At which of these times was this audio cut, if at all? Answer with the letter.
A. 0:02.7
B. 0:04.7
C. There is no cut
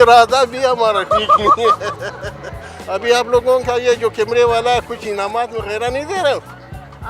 A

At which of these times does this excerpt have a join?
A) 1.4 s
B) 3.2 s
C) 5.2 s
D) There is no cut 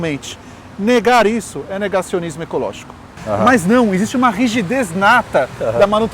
B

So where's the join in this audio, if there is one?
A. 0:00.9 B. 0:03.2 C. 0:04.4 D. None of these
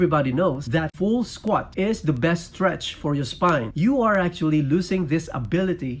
A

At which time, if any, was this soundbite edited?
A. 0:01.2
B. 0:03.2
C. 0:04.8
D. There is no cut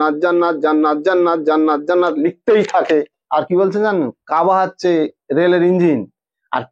B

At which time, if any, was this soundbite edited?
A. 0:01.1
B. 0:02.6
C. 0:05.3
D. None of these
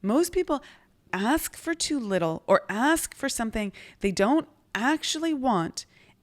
A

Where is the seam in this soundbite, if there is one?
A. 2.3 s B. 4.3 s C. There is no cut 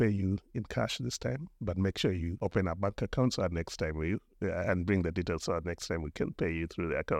A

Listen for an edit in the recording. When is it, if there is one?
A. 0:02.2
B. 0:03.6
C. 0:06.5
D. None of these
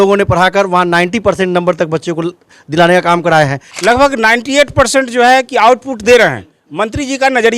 B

